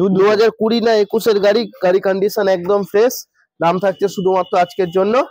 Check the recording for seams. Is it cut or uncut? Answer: uncut